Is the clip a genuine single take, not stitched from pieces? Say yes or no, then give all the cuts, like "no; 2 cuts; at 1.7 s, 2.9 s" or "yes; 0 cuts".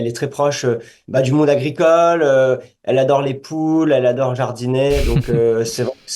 no; 1 cut; at 1.0 s